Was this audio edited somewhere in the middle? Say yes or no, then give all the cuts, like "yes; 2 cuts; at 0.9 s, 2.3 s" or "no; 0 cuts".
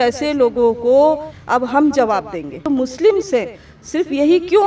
yes; 1 cut; at 2.7 s